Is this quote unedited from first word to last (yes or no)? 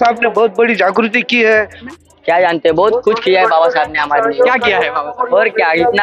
no